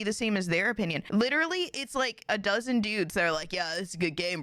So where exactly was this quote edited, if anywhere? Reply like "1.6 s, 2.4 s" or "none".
1.0 s, 2.3 s